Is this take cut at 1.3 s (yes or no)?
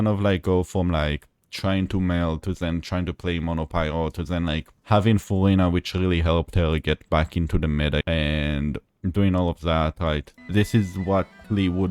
no